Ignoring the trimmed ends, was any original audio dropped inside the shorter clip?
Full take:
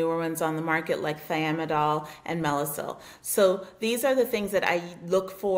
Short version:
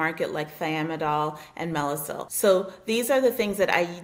yes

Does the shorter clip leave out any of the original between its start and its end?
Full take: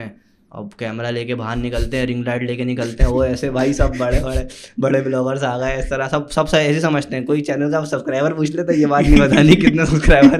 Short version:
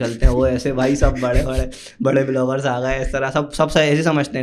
no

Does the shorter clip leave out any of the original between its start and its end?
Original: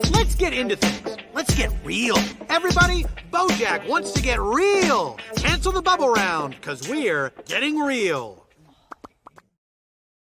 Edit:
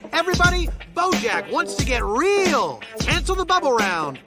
no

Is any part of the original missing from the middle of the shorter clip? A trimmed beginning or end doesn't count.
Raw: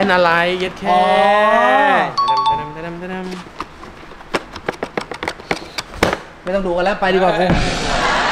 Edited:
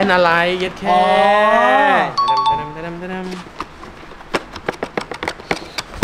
no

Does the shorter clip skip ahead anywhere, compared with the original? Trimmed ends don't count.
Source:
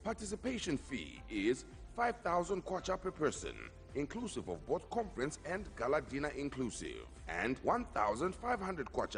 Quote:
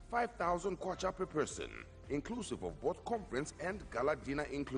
no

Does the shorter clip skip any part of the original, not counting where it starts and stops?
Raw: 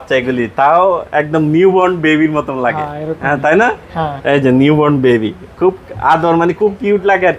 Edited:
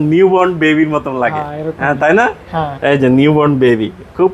no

